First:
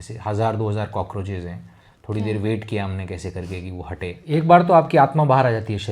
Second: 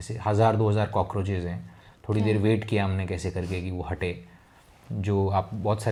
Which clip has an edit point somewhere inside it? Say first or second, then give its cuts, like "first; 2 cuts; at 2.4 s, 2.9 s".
first; 1 cut; at 4.2 s